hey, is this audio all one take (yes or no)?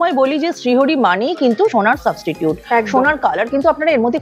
yes